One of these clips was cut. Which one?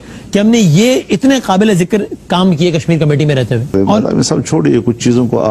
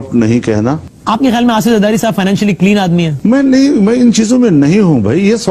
second; 2 cuts; at 0.9 s, 3.1 s

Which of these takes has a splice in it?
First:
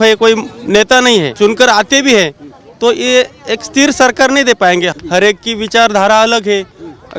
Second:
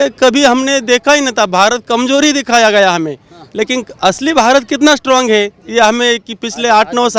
first; 2 cuts; at 1.3 s, 4.9 s

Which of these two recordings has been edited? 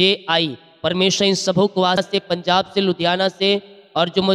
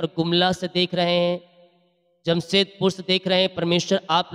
first; 1 cut; at 2.0 s

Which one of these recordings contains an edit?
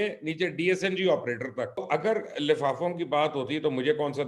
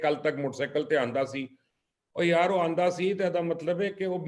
first; 1 cut; at 1.8 s

